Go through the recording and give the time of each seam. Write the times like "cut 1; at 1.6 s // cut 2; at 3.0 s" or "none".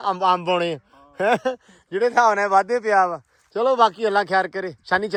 none